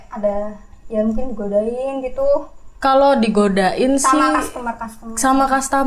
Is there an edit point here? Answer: no; 0 cuts

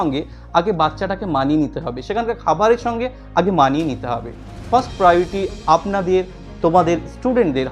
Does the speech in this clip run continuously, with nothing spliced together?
yes; 0 cuts

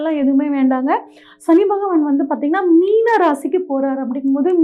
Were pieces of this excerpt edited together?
no; 0 cuts

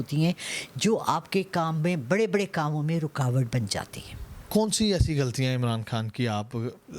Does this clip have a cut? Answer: no; 0 cuts

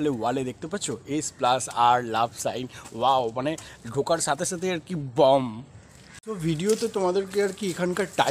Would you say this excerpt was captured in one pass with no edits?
no; 1 cut; at 6.1 s

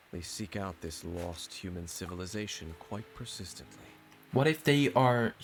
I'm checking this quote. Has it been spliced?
no; 0 cuts

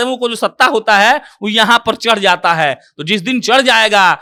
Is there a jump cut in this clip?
no; 0 cuts

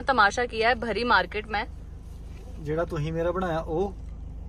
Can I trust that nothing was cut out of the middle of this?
yes; 0 cuts

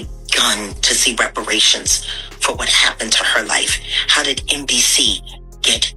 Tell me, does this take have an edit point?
no; 0 cuts

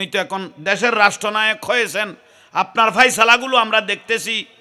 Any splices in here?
no; 0 cuts

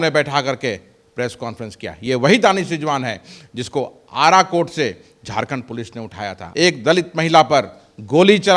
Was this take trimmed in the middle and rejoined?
yes; 1 cut; at 6.4 s

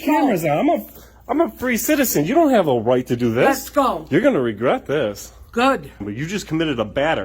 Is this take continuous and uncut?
no; 1 cut; at 6.1 s

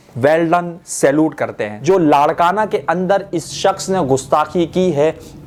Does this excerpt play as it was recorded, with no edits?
yes; 0 cuts

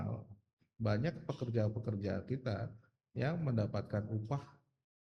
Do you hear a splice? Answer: no; 0 cuts

